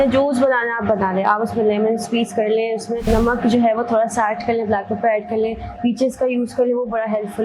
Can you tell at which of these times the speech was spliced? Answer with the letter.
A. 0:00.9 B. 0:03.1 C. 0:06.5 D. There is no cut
B